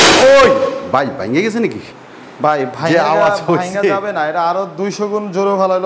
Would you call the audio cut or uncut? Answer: uncut